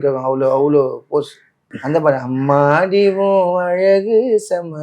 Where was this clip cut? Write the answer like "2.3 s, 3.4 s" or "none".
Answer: 1.7 s